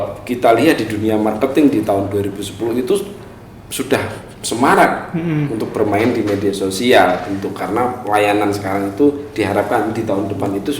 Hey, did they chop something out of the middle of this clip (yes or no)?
yes